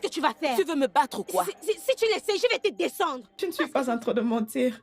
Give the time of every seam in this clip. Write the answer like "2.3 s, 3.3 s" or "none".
3.3 s